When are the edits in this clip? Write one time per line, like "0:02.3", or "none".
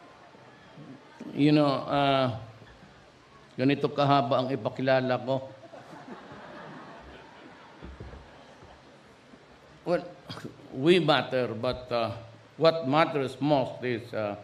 0:08.5